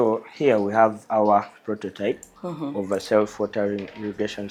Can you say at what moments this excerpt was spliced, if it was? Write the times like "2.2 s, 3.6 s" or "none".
none